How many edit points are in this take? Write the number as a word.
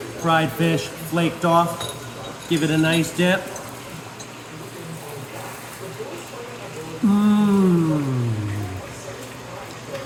zero